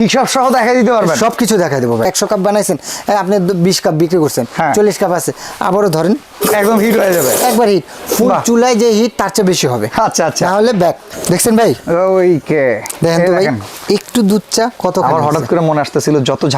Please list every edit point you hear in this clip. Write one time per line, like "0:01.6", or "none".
0:02.0
0:11.1